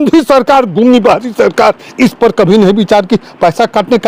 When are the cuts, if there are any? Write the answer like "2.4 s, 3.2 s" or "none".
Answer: none

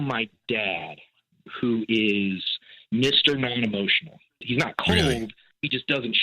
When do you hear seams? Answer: 4.4 s

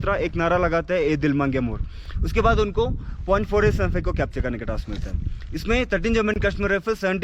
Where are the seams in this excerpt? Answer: none

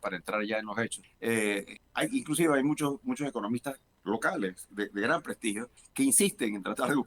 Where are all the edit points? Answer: 1.0 s, 1.8 s, 3.9 s, 5.8 s

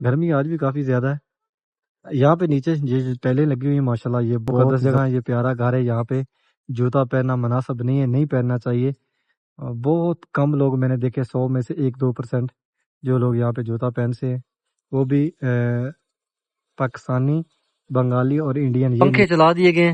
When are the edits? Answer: 4.7 s, 19.0 s

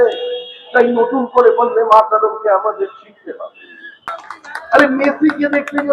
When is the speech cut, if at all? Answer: 4.1 s

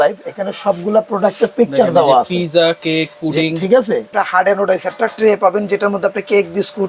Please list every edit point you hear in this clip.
4.1 s

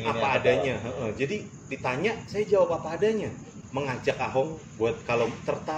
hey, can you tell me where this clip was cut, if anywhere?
3.6 s

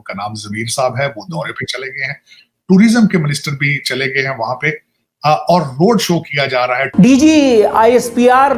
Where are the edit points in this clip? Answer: 6.8 s

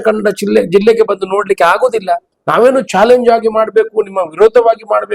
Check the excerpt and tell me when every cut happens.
2.3 s

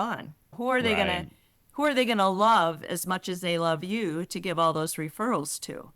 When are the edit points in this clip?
none

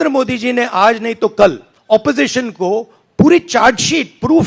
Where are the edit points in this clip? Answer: 1.7 s

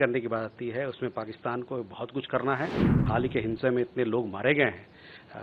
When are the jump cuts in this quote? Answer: 3.0 s

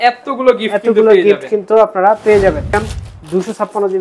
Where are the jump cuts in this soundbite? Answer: 2.9 s

